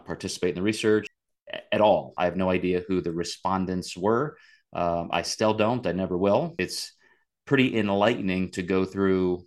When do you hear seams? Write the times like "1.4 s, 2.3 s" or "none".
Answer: 1.2 s, 2.1 s, 6.5 s